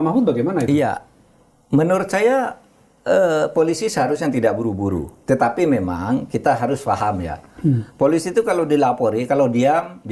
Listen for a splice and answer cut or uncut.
uncut